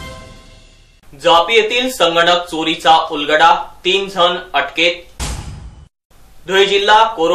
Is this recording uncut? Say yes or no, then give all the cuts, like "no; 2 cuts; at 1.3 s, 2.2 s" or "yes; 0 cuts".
no; 1 cut; at 0.9 s